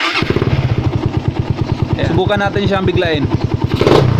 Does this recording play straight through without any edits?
no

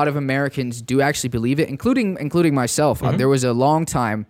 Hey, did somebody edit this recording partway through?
no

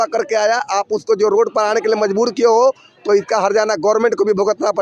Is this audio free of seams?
yes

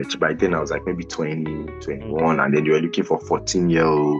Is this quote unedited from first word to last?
yes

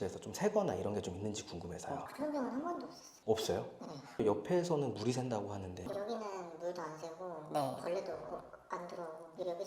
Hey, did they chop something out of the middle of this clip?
no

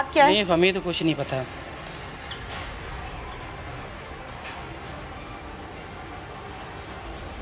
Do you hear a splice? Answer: no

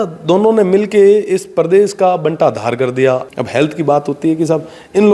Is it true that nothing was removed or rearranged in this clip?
no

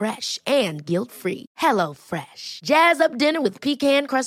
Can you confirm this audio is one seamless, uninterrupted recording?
yes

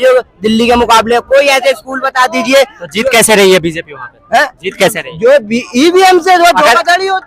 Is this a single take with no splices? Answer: yes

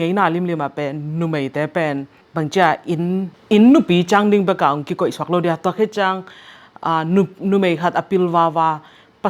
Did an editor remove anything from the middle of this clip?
yes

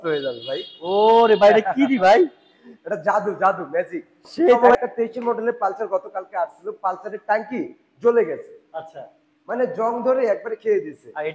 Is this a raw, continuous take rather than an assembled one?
no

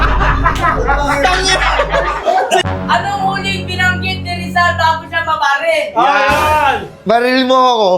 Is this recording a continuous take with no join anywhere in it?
no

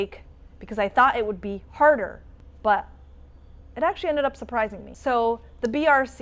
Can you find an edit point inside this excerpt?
no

